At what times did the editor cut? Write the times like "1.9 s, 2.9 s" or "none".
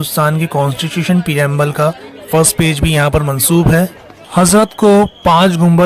4.2 s